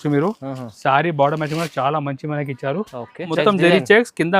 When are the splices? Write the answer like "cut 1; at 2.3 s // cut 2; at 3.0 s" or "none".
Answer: cut 1; at 3.3 s